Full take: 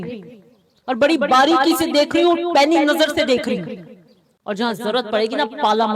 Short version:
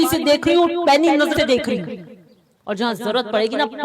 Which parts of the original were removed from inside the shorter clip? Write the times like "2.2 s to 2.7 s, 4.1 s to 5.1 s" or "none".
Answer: 3.0 s to 3.1 s